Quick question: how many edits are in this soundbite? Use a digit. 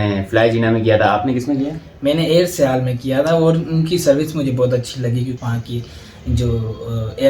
1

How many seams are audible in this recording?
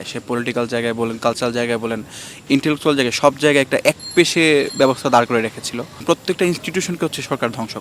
1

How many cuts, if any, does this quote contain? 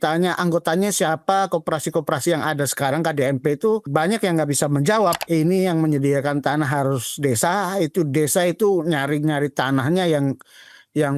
2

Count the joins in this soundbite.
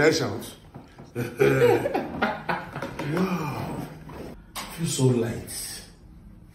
1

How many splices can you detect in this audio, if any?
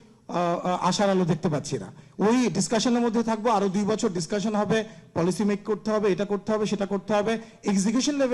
0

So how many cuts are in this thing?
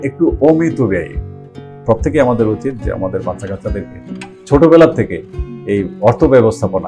1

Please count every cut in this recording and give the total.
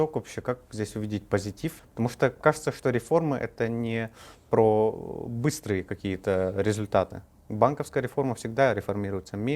0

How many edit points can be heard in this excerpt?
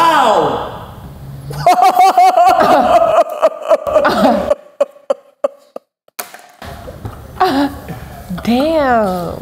0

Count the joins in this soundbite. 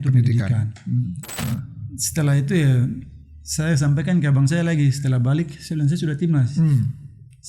1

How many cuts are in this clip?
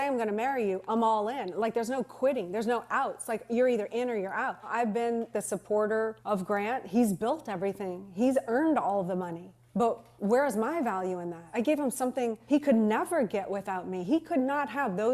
3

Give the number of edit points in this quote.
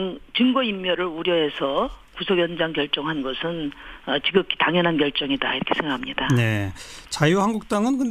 1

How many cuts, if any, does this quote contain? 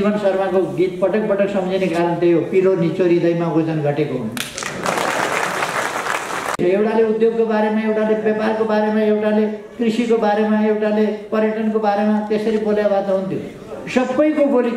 1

